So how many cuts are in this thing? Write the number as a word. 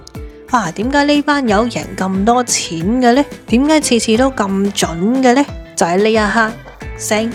zero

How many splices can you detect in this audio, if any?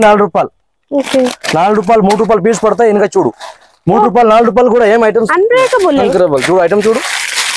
zero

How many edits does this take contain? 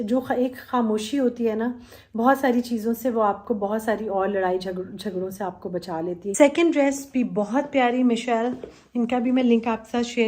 one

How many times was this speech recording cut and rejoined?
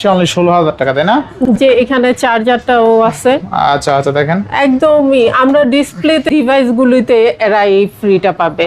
two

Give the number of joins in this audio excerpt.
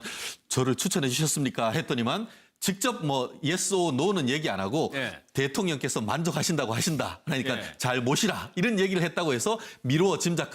one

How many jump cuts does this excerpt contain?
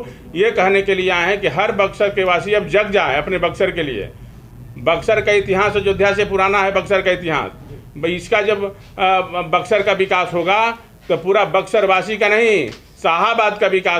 zero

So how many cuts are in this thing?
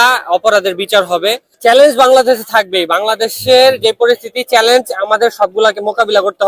one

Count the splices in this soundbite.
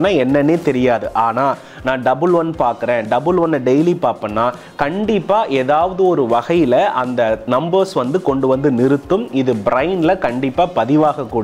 zero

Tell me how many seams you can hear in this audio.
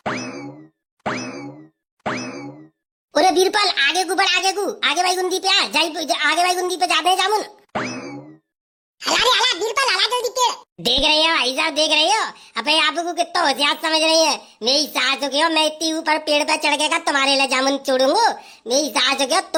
zero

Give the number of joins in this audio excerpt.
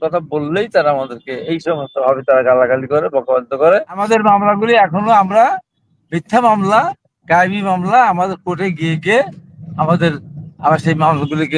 one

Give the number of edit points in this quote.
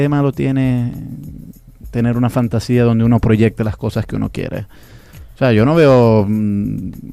zero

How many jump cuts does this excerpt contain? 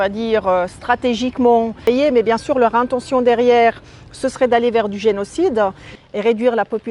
two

